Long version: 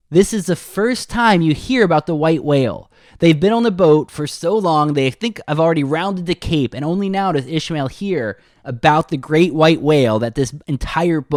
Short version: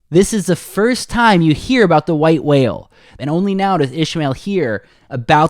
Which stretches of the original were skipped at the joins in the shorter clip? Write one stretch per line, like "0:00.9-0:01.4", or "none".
0:03.1-0:06.7